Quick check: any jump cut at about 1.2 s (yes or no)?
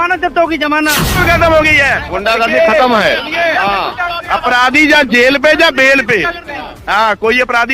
yes